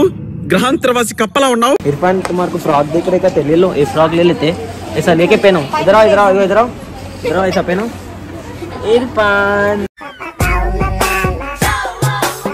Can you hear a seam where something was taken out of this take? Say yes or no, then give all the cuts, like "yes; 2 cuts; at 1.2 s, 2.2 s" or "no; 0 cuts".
yes; 1 cut; at 1.8 s